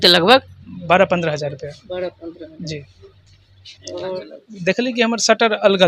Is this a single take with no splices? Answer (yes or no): no